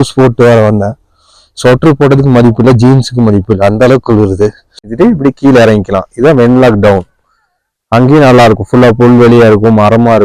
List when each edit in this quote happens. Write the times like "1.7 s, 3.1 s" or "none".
4.9 s